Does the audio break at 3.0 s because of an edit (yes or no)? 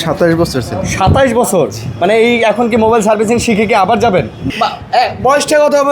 no